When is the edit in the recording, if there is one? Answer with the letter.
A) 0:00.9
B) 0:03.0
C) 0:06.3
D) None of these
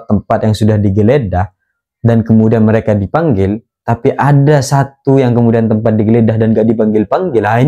D